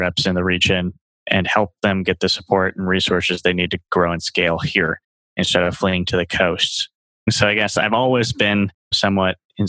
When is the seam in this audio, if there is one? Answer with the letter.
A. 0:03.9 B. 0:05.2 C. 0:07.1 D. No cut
C